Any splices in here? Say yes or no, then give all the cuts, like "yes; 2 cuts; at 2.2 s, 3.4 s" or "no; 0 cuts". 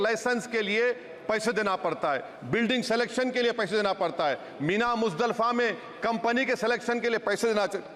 no; 0 cuts